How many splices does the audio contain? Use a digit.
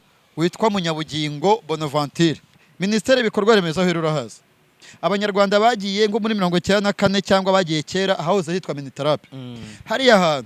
1